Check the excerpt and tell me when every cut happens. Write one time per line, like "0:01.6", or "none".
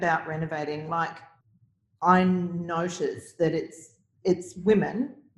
0:01.2